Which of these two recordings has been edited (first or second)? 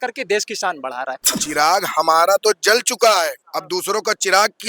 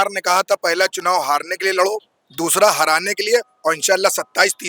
first